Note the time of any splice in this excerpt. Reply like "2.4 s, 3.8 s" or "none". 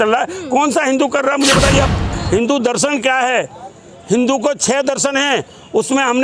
2.1 s